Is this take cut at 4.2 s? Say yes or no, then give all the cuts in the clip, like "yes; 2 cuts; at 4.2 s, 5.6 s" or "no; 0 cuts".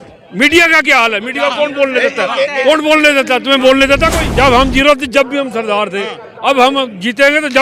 yes; 1 cut; at 4.2 s